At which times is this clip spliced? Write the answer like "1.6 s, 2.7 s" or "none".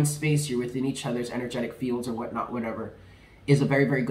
none